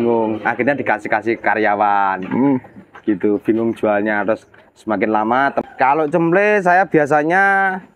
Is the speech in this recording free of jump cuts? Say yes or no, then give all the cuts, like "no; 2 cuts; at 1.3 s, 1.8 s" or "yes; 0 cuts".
no; 1 cut; at 5.6 s